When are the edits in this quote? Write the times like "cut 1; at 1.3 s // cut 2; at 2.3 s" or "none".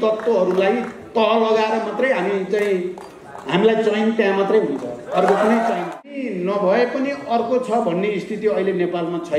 cut 1; at 6.2 s